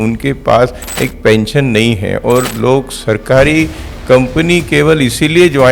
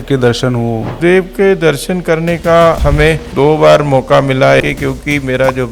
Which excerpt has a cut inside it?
second; 3 cuts; at 1.0 s, 2.8 s, 4.6 s

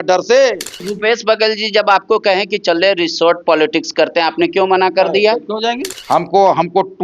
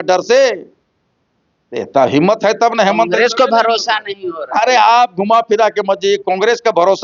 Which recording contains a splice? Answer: first; 2 cuts; at 0.9 s, 5.9 s

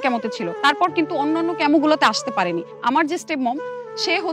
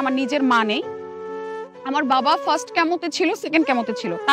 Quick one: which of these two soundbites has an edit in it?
first; 1 cut; at 2.7 s

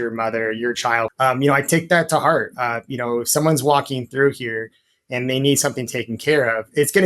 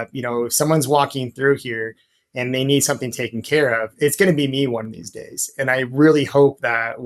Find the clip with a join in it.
first; 1 cut; at 1.1 s

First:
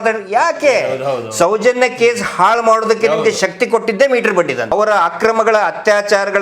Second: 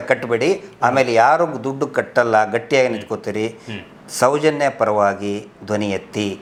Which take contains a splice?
first; 1 cut; at 4.7 s

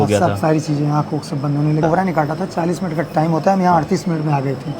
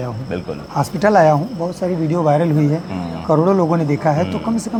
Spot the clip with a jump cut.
first; 1 cut; at 1.8 s

